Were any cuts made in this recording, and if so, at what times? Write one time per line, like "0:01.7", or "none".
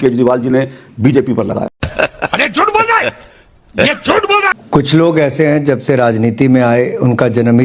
0:01.8
0:04.6